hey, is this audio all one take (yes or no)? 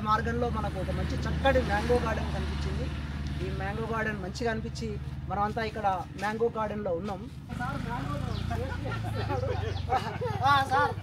yes